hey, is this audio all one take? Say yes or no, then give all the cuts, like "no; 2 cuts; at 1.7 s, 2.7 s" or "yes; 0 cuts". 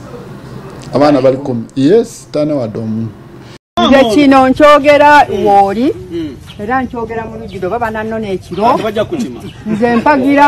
no; 1 cut; at 3.7 s